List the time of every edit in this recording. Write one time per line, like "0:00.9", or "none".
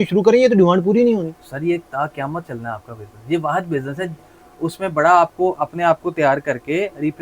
0:04.3